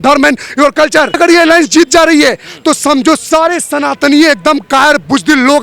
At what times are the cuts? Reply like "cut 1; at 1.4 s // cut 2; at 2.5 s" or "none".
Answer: cut 1; at 1.2 s